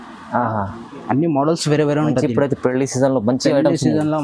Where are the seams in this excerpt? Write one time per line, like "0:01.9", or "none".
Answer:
none